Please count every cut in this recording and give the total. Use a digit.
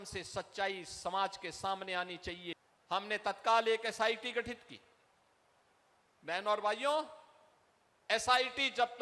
1